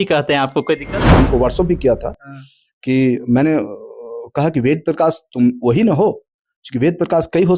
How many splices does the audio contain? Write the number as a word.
one